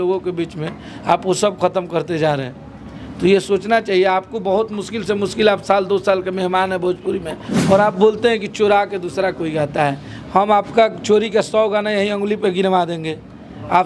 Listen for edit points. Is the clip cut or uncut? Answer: cut